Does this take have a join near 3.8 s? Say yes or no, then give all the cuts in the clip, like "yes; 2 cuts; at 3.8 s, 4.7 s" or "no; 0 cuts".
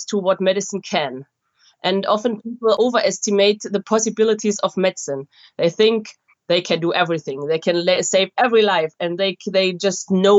yes; 2 cuts; at 2.8 s, 3.8 s